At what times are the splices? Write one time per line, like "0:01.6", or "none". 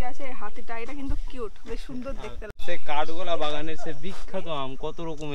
0:02.4